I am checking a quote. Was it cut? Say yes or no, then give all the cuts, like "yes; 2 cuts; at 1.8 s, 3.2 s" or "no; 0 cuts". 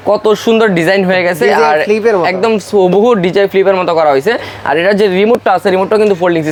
no; 0 cuts